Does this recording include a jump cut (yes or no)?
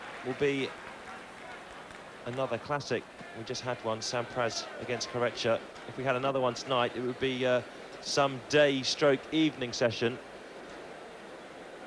yes